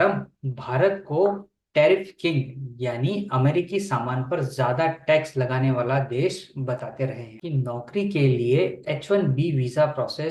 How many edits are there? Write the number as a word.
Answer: one